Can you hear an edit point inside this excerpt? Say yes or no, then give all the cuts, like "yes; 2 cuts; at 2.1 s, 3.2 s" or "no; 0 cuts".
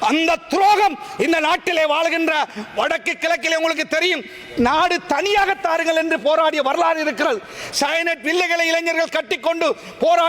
no; 0 cuts